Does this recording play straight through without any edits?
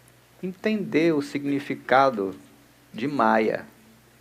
yes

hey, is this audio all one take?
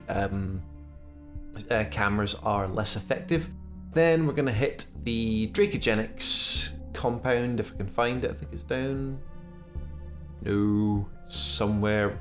no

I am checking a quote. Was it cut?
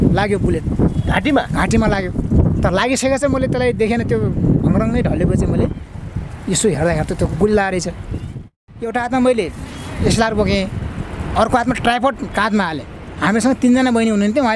yes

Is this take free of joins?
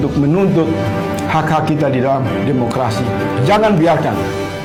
yes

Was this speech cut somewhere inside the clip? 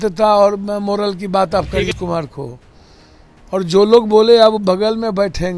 yes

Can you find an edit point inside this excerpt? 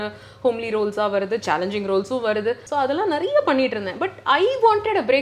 no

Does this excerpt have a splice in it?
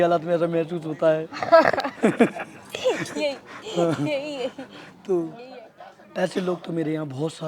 yes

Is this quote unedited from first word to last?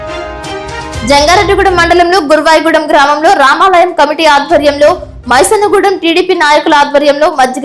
no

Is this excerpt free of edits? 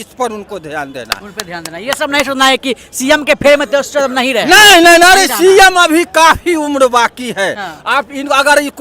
yes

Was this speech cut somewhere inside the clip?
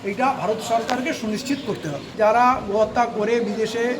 yes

